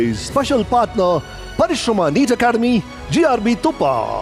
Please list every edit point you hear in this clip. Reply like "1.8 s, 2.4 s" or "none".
none